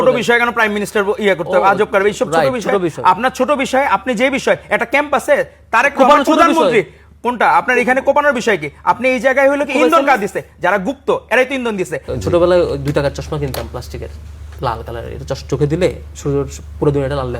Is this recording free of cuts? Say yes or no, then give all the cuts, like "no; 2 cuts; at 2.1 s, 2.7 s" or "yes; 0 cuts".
no; 1 cut; at 12.0 s